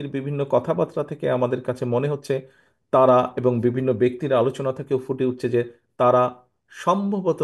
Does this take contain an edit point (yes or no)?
no